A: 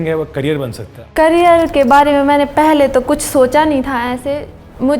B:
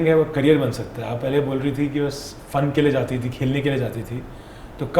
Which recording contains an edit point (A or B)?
A